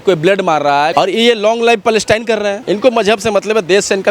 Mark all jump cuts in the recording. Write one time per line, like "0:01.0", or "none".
0:00.9
0:02.6